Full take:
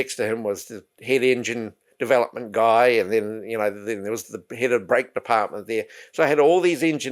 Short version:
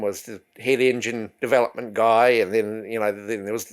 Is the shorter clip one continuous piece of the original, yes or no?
no